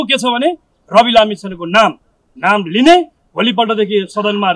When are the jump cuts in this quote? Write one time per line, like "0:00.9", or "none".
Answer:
none